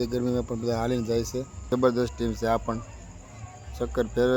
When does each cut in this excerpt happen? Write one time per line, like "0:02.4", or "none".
0:01.7